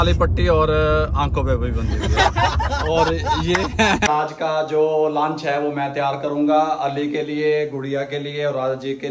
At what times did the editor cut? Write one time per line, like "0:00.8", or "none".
0:04.1